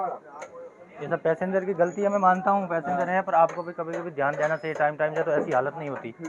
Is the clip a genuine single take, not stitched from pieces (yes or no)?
yes